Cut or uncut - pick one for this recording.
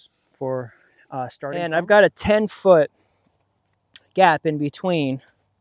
cut